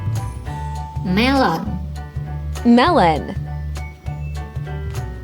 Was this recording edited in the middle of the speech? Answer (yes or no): yes